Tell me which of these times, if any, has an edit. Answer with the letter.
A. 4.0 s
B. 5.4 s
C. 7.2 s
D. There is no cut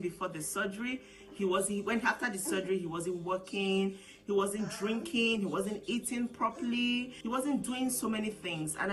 C